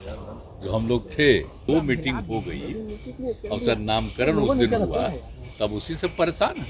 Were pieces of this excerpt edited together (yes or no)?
yes